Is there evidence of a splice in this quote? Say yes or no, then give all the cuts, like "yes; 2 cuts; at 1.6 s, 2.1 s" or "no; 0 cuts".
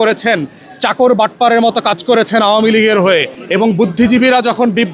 yes; 1 cut; at 3.4 s